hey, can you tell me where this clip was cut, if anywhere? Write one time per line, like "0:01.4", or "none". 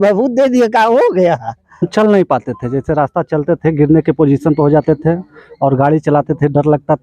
0:01.9